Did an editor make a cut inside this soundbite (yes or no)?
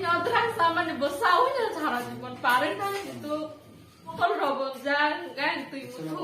yes